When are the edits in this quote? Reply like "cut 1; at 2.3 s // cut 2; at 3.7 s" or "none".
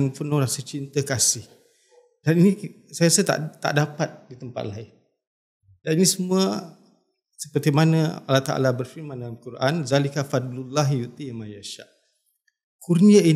none